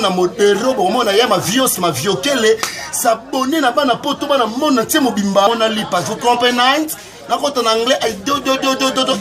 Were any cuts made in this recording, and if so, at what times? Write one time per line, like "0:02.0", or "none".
0:05.5